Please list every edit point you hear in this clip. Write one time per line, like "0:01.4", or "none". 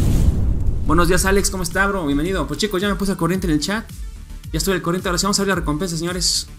0:00.9